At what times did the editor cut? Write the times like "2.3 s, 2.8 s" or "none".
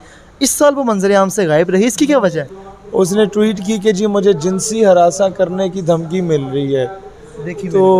2.4 s